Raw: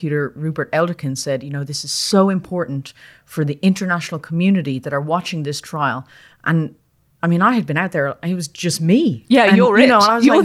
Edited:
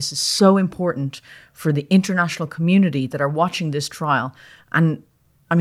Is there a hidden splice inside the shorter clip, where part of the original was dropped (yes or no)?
no